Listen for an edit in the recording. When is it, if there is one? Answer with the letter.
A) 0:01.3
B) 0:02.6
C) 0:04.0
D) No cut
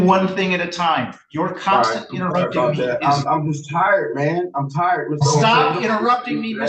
D